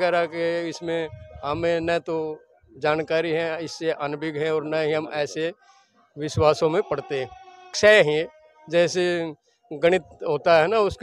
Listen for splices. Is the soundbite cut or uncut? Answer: cut